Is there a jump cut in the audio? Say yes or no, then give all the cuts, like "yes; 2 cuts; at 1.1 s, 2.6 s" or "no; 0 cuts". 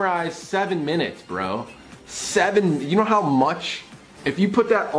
no; 0 cuts